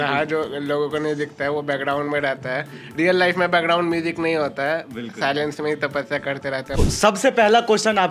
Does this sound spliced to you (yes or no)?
yes